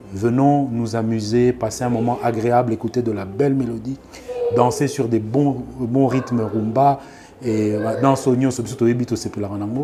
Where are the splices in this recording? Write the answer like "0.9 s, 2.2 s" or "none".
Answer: none